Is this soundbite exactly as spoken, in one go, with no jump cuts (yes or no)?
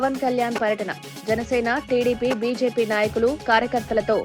yes